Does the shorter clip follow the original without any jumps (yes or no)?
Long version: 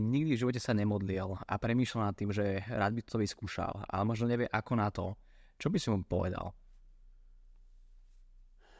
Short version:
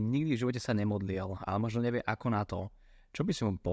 no